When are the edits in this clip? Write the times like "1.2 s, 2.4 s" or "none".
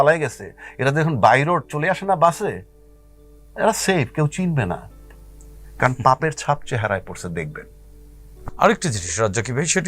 none